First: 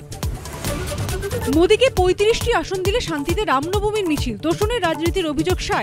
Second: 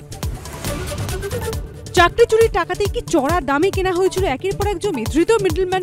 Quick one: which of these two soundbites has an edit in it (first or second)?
second